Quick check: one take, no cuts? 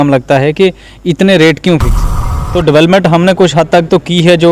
no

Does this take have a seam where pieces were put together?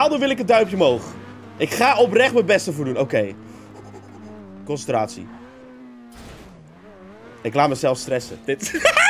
no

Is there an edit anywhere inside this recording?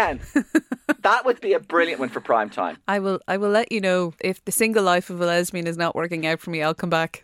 yes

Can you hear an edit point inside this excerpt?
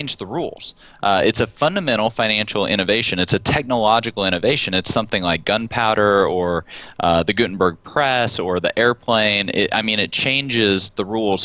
no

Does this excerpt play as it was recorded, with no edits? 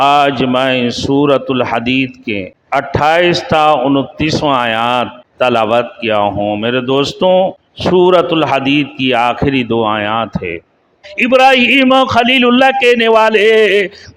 no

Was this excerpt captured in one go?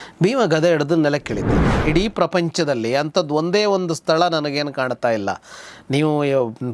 no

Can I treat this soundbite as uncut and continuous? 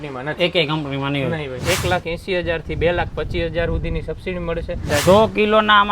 no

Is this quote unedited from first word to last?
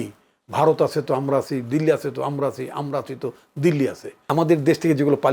no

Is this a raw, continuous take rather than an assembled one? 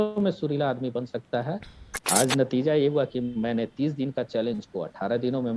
no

